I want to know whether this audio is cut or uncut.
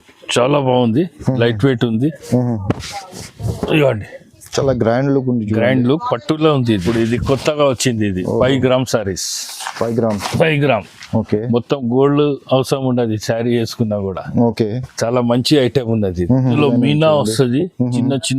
cut